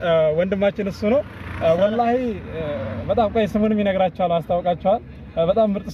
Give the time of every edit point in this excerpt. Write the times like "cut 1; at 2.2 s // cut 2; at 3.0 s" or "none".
none